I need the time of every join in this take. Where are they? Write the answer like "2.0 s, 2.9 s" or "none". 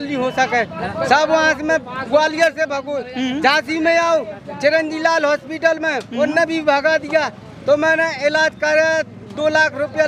none